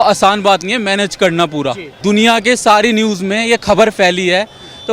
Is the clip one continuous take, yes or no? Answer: no